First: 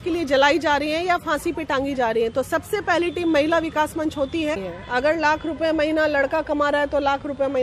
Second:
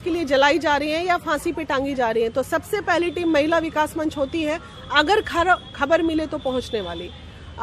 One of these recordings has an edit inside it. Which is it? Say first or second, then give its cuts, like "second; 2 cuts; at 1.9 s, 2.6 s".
first; 1 cut; at 4.7 s